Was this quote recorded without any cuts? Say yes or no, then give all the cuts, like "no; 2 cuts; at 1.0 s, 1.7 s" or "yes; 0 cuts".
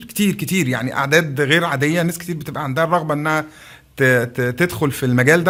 yes; 0 cuts